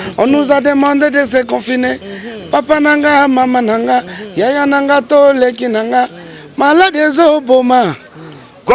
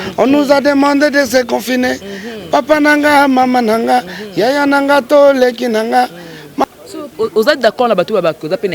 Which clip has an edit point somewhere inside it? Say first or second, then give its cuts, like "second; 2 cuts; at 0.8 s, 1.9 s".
second; 1 cut; at 6.6 s